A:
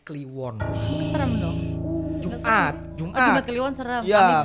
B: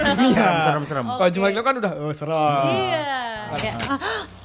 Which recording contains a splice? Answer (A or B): B